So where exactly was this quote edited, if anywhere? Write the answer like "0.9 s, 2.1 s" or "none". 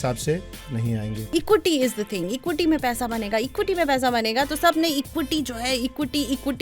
1.2 s